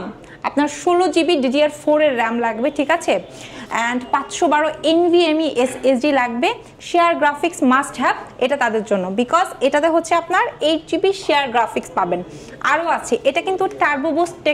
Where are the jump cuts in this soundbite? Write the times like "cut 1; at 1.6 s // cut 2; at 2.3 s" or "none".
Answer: none